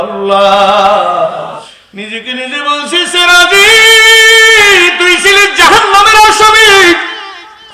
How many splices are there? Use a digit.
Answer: 1